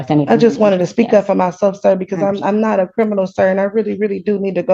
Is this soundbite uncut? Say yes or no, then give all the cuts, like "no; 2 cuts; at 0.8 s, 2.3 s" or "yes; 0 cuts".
yes; 0 cuts